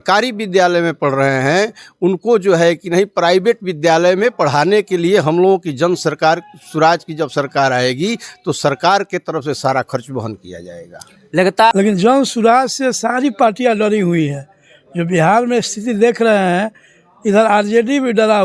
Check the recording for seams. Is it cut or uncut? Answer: cut